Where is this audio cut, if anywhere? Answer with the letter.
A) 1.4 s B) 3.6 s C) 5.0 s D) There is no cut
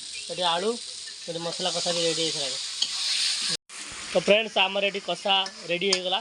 B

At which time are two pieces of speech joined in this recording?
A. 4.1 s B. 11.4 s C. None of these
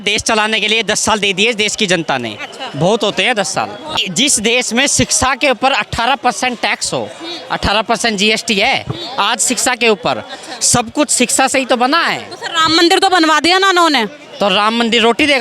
A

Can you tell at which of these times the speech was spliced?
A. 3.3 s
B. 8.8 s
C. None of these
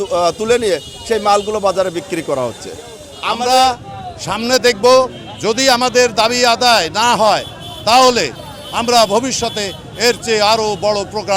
A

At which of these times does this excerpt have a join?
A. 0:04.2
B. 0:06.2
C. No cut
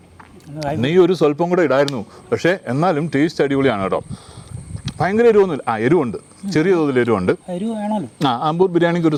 C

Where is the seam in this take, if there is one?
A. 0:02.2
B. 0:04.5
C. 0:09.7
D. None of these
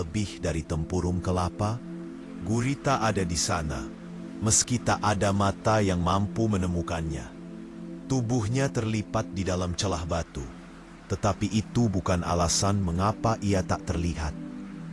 A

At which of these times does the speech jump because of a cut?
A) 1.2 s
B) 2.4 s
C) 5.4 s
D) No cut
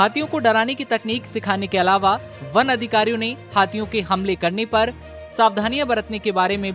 D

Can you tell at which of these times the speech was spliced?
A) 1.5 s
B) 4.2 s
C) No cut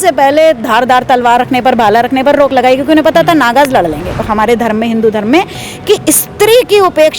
B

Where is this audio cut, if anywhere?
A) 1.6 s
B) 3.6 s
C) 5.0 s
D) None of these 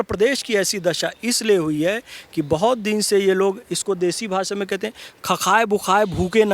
D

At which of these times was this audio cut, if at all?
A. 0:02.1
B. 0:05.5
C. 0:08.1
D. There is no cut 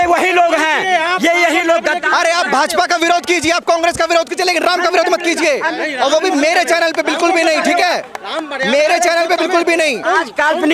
D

